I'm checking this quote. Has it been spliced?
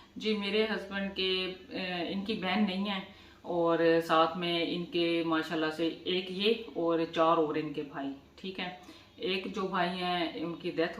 no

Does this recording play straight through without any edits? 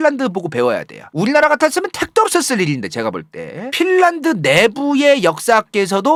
yes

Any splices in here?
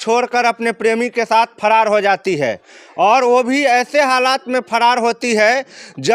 no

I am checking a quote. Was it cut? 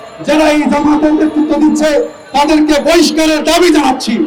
no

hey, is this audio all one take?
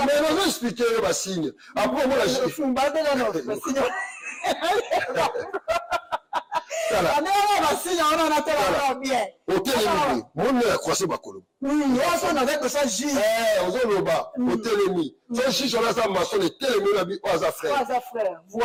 yes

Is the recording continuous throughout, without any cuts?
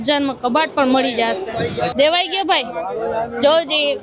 no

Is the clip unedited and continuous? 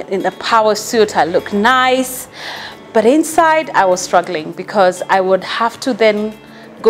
yes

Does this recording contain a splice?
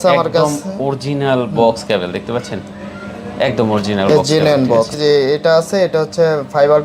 yes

